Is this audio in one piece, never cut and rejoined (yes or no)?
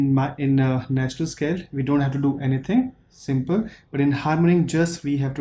yes